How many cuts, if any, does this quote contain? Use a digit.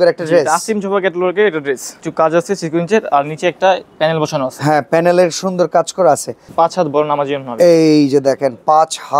2